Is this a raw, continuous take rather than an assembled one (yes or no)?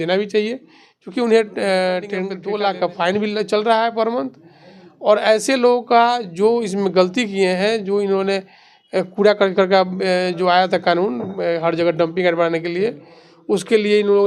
no